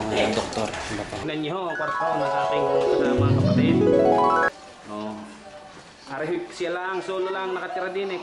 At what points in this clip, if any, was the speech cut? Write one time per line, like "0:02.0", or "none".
0:01.3